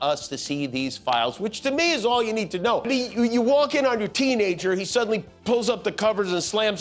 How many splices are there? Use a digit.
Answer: 1